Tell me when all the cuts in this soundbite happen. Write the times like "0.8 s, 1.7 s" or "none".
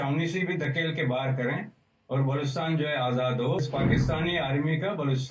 3.6 s